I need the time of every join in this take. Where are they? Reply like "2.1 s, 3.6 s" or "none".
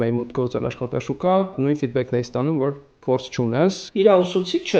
1.5 s, 3.8 s